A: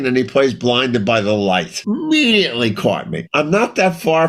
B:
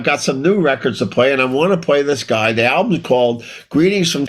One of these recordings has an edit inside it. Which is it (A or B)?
A